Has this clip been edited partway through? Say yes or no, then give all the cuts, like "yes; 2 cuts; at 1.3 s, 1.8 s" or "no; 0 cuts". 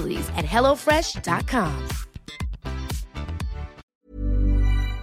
yes; 1 cut; at 3.8 s